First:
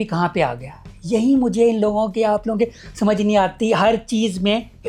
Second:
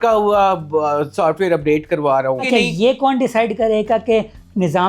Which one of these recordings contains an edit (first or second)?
second